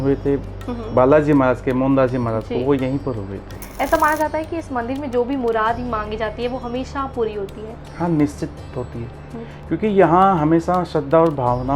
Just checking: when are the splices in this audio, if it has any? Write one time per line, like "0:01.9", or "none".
none